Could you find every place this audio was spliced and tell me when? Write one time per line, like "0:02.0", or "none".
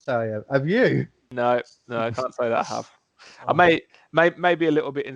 0:01.2